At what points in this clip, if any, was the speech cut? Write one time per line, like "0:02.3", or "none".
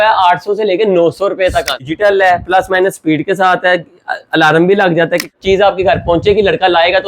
0:01.8
0:05.3